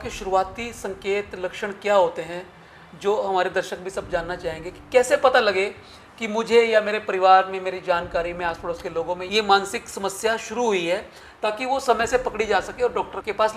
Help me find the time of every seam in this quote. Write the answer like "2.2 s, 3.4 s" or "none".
none